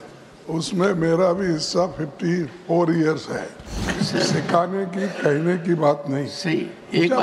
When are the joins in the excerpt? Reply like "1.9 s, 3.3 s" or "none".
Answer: 3.9 s

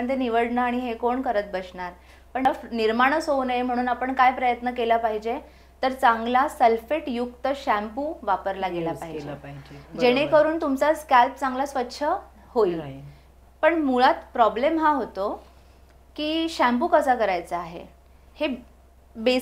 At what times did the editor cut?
2.4 s

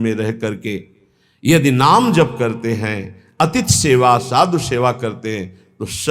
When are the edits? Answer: none

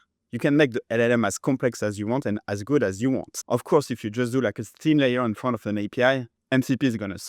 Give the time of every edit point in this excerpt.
3.3 s, 6.3 s

